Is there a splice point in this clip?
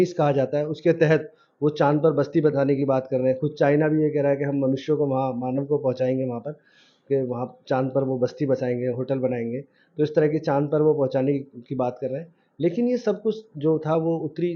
no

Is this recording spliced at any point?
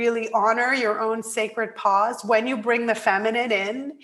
no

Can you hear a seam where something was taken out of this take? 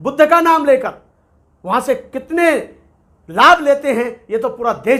no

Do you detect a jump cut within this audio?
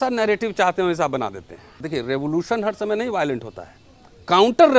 yes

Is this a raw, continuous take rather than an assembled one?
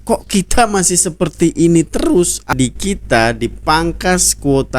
no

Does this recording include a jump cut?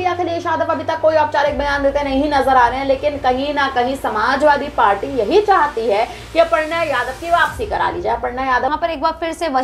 yes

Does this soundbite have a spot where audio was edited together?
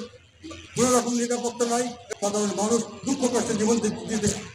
yes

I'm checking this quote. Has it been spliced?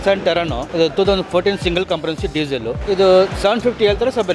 yes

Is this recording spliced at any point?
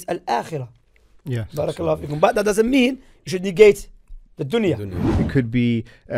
yes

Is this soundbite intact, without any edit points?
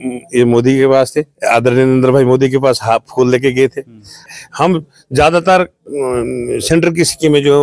no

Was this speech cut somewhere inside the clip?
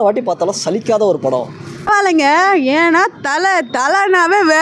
yes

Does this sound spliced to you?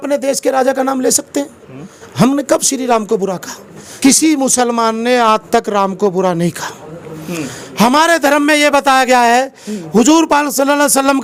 no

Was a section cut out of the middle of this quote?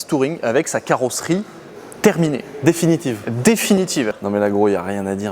yes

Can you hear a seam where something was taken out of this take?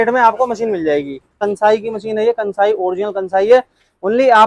yes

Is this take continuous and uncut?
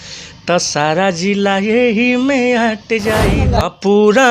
no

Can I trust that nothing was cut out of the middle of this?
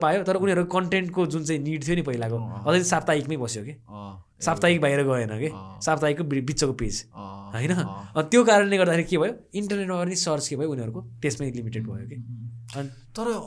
yes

